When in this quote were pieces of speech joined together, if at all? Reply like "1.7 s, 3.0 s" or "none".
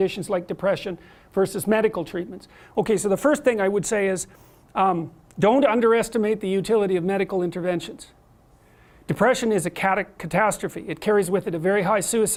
none